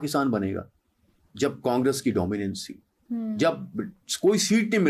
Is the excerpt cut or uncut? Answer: uncut